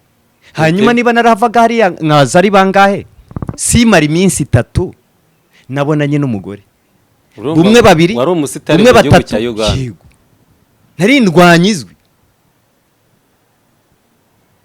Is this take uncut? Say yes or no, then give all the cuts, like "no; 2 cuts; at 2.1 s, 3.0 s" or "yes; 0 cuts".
yes; 0 cuts